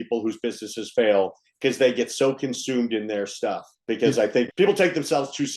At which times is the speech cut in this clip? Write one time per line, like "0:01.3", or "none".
0:03.7
0:04.5